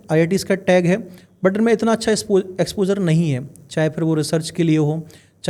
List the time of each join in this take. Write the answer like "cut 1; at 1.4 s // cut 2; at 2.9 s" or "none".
none